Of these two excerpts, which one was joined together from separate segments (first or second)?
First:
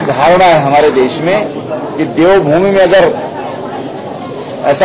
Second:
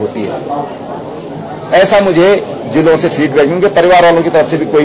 first